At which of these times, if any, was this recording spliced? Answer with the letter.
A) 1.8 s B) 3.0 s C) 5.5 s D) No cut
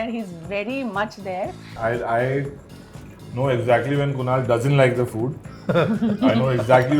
A